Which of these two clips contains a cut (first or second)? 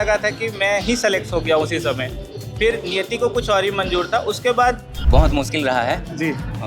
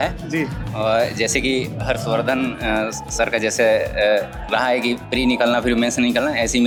first